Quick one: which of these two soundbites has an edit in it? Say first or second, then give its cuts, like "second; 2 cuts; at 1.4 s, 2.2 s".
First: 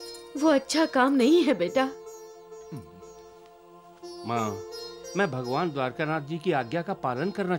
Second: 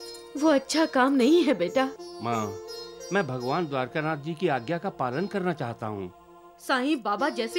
second; 1 cut; at 2.0 s